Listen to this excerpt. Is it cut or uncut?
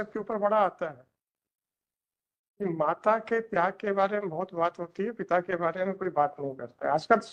uncut